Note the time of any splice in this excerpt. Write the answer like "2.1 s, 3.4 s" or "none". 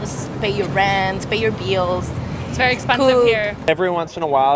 3.6 s